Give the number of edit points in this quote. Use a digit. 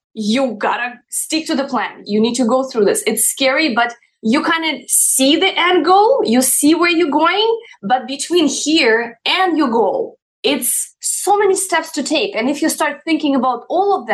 1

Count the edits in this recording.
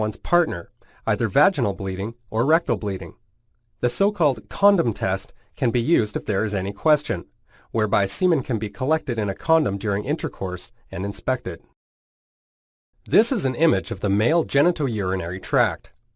1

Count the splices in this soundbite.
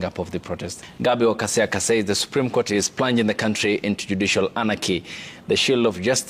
1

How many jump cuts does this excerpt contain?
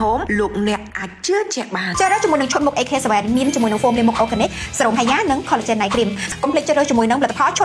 2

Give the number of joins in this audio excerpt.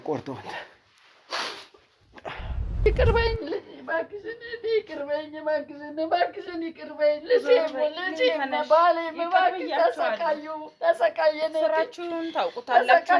1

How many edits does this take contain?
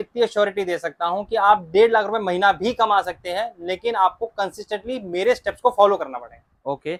0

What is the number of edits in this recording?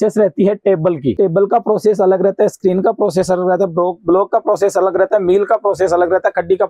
1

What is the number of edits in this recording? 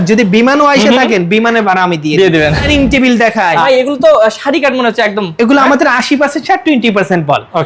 2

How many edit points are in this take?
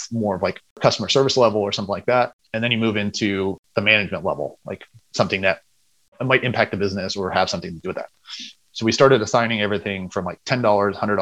4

